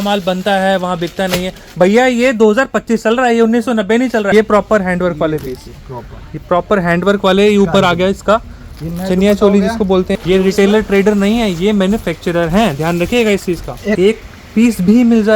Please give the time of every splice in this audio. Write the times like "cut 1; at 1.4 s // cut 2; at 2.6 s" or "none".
cut 1; at 4.3 s // cut 2; at 10.1 s // cut 3; at 14.0 s